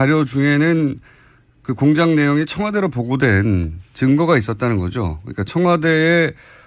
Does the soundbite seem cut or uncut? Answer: cut